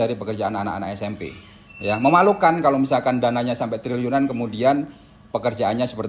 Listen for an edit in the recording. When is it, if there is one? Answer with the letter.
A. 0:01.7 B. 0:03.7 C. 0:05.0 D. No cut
A